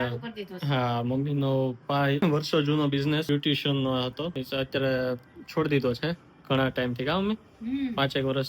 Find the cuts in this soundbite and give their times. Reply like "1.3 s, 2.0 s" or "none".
2.2 s, 3.2 s, 4.4 s